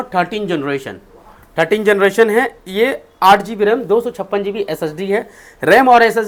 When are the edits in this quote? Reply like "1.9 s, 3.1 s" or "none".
none